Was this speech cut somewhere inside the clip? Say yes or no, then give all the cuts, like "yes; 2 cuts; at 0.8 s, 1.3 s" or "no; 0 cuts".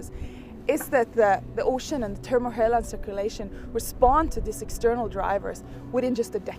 no; 0 cuts